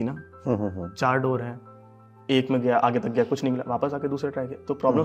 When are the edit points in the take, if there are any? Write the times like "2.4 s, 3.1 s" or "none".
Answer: none